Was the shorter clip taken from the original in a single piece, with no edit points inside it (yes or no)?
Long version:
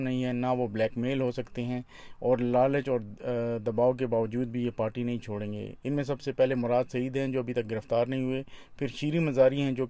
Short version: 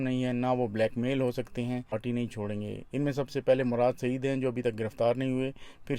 no